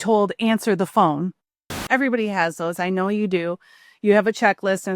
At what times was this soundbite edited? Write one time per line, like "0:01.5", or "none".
0:01.8